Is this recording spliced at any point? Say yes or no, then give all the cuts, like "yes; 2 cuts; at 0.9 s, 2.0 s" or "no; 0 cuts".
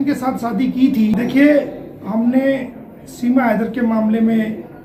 no; 0 cuts